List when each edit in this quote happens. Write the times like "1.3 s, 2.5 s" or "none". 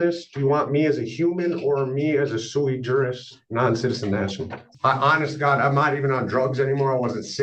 4.7 s